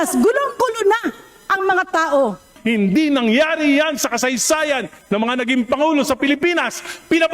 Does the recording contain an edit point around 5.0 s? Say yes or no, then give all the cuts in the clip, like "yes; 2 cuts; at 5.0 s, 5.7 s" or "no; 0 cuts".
no; 1 cut; at 2.5 s